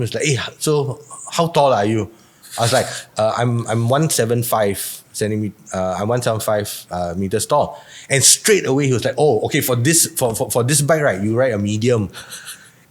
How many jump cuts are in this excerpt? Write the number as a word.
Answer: zero